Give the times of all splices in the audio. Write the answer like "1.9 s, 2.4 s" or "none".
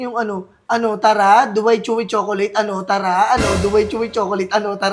none